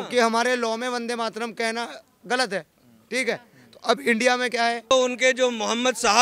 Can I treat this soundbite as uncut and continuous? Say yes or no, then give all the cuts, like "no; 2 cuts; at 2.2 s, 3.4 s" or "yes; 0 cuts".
no; 1 cut; at 4.9 s